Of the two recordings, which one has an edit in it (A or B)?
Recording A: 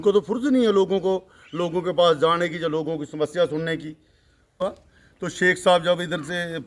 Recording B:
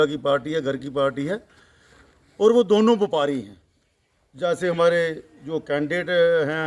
A